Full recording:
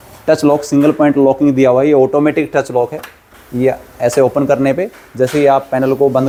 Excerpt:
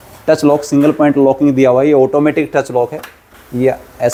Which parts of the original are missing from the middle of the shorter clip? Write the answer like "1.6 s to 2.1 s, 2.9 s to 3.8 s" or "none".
none